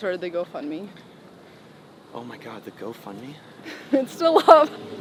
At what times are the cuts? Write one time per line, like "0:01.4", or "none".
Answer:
none